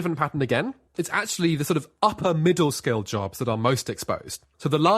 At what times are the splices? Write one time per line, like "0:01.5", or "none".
0:00.9